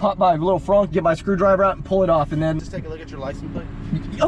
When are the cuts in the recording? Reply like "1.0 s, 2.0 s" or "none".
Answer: 2.6 s